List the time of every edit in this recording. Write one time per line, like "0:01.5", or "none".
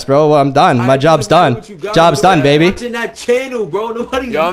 none

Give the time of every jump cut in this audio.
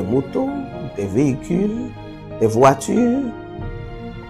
none

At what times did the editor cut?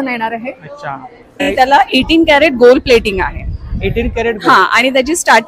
0:01.4

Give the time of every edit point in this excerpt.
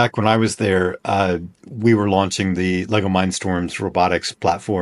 none

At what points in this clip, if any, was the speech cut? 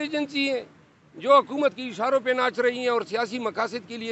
none

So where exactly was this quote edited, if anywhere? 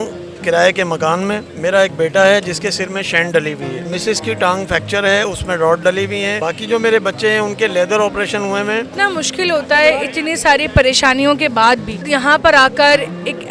0:01.5
0:03.9
0:06.4
0:08.9
0:12.0

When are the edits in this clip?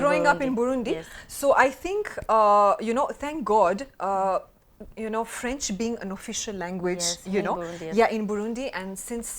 none

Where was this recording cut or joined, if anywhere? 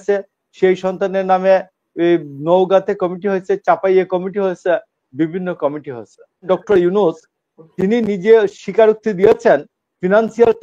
0:06.4

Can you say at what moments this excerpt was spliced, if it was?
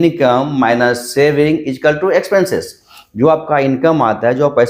none

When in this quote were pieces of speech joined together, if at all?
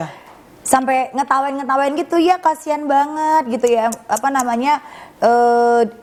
none

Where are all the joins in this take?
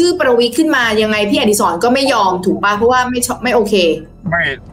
none

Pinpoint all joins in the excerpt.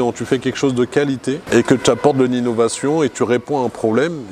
0:01.4

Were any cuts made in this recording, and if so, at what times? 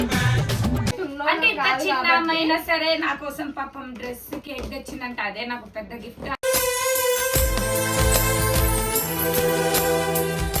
0:00.9

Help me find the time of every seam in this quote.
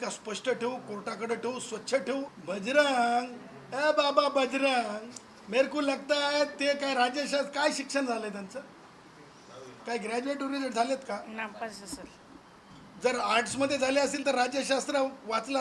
0:02.4

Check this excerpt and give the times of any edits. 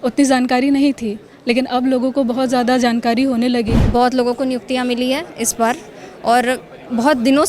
0:03.8

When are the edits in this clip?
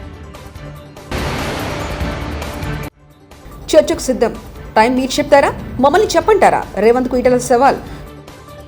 0:01.1
0:02.9

